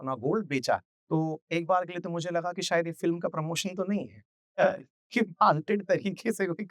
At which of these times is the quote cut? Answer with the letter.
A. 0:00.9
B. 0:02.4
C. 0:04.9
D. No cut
A